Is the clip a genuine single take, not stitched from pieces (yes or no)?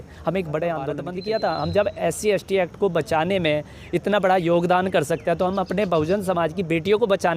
no